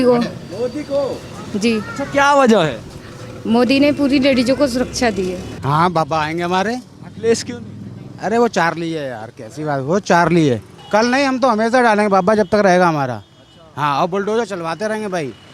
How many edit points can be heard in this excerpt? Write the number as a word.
two